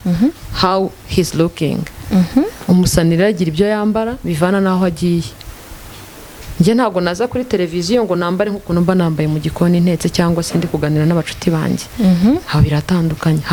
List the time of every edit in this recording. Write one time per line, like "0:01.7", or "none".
none